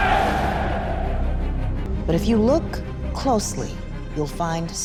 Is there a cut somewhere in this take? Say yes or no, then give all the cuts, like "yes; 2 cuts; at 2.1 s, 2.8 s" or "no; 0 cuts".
no; 0 cuts